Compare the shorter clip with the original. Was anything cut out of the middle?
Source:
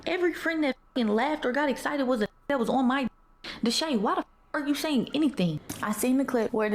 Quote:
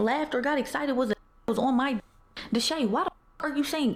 no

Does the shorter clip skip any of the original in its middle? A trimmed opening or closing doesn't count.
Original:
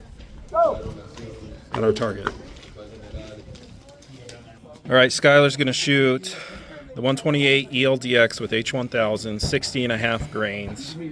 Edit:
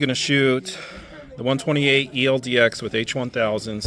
no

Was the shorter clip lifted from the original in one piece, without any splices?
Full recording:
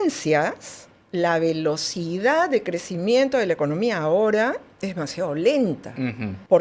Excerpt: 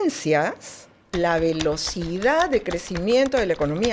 yes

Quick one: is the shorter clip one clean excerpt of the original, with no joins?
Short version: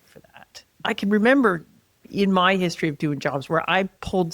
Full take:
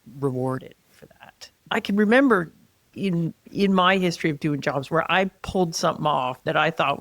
no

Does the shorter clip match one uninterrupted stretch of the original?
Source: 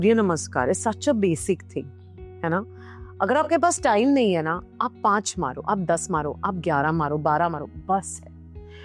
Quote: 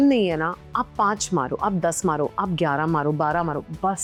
yes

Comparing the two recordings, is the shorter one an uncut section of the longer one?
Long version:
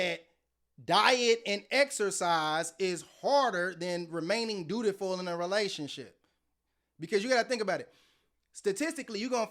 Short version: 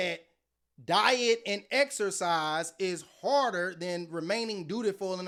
yes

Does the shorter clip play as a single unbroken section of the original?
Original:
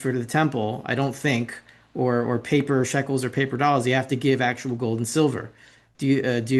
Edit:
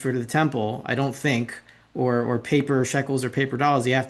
yes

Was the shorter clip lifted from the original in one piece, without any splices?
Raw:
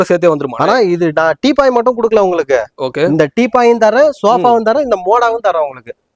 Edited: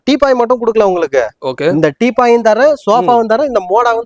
yes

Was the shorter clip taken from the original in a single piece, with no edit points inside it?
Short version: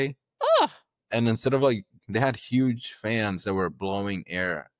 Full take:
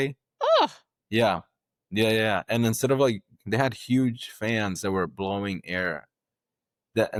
no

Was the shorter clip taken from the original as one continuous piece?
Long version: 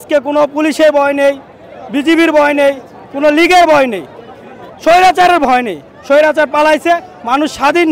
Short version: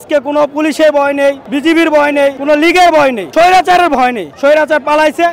no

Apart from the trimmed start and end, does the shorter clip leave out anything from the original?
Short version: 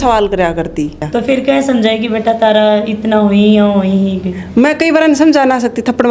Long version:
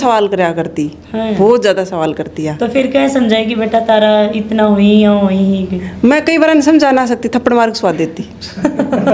yes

